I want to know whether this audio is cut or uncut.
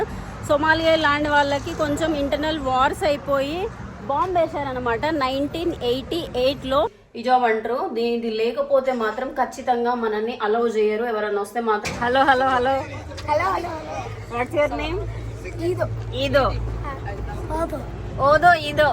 cut